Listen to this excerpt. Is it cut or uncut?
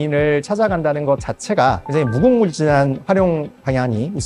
cut